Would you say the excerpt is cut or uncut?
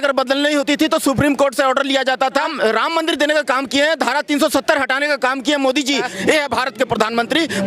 cut